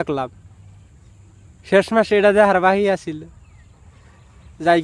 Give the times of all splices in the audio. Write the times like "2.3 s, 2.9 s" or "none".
none